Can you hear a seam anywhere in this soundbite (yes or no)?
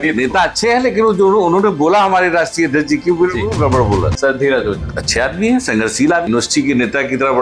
yes